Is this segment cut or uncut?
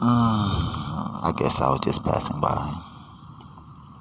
cut